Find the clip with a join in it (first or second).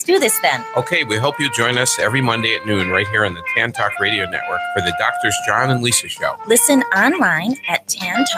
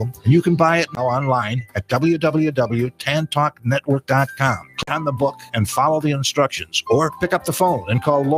second